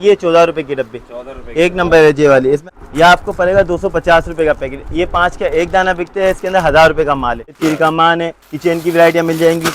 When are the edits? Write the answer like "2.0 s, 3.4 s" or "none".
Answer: 2.6 s, 7.6 s